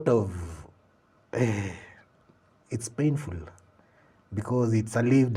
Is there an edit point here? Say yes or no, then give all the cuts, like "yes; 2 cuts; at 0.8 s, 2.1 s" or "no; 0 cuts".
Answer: no; 0 cuts